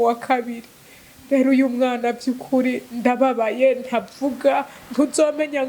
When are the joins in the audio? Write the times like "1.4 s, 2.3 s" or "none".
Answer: none